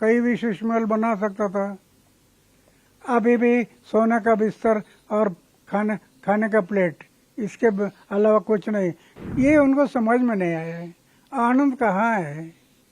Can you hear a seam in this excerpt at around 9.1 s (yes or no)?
yes